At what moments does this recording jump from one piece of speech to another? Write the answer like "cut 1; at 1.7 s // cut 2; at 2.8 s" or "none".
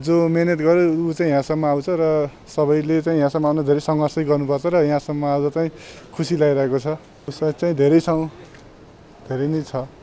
none